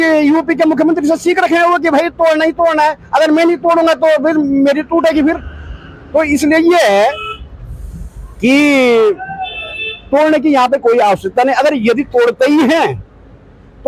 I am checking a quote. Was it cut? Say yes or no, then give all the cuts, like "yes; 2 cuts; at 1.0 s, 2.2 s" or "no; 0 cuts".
no; 0 cuts